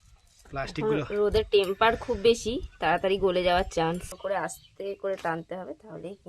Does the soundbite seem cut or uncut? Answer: cut